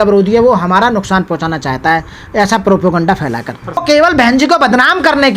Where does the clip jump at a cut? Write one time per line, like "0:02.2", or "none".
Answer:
0:03.8